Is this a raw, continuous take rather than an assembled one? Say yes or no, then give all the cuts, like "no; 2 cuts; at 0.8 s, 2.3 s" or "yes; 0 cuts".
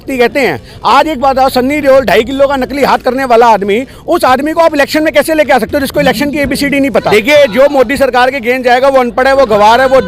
no; 1 cut; at 7.1 s